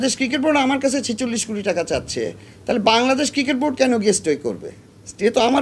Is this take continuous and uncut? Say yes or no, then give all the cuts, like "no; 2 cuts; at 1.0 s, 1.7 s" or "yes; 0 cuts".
yes; 0 cuts